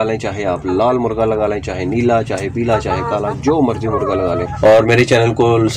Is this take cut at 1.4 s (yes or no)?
no